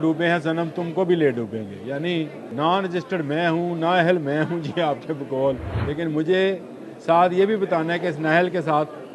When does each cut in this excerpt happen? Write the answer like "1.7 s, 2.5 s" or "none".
2.4 s, 5.7 s